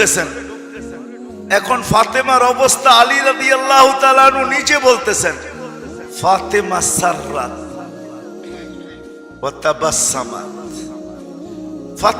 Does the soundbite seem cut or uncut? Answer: cut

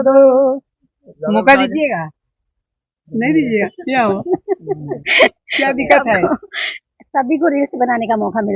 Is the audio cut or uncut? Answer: uncut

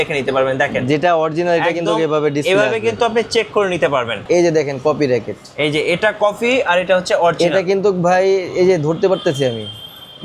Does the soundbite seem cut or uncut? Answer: cut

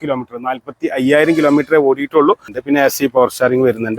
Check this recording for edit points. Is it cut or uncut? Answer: cut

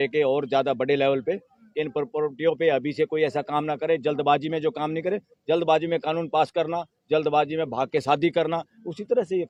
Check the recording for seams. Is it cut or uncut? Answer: uncut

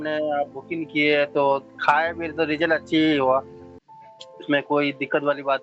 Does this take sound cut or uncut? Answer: uncut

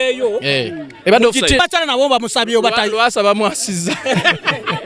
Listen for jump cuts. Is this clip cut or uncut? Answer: cut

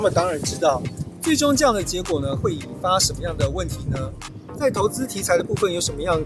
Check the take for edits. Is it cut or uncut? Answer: cut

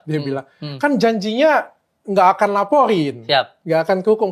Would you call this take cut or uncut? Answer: uncut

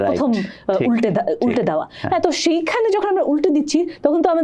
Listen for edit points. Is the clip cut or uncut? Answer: uncut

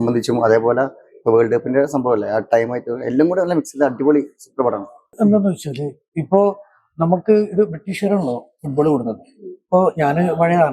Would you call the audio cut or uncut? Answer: cut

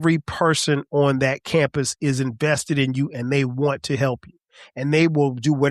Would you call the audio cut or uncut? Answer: uncut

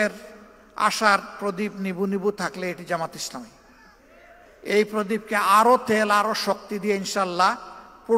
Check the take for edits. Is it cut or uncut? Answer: cut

